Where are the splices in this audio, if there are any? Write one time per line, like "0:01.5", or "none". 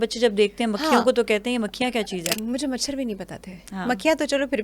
0:02.4